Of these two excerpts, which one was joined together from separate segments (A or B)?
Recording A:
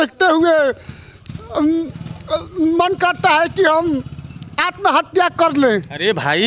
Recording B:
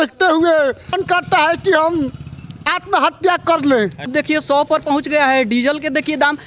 B